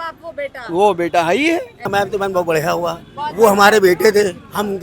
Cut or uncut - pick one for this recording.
cut